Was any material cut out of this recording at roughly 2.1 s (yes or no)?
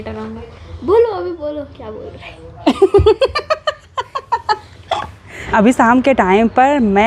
no